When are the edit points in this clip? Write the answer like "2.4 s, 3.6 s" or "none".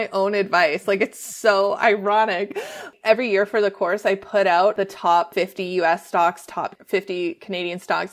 2.8 s, 5.2 s, 6.8 s